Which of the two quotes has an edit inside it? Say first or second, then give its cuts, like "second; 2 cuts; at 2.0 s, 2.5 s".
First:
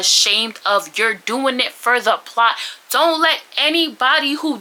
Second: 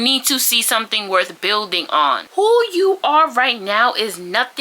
second; 1 cut; at 2.3 s